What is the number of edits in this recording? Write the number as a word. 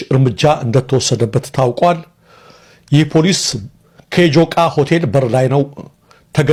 zero